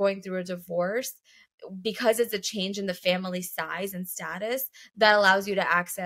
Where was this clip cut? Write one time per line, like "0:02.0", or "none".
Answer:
none